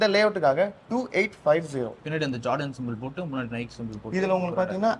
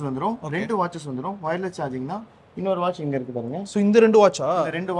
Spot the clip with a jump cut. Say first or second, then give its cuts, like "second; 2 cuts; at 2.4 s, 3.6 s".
first; 1 cut; at 2.0 s